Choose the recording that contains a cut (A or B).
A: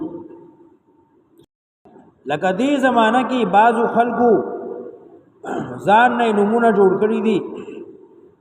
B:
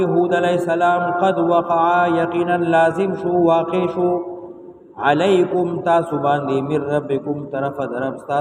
A